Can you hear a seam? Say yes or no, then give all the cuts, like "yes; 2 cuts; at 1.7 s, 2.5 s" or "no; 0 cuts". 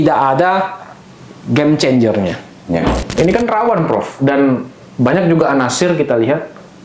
yes; 1 cut; at 3.0 s